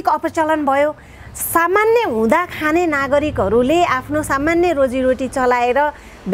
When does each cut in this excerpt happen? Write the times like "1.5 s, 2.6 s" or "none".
none